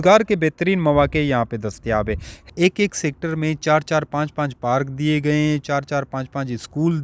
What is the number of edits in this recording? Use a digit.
1